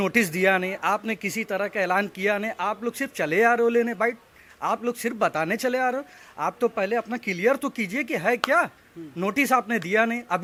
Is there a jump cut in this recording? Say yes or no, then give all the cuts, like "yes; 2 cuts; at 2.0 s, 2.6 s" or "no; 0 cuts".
no; 0 cuts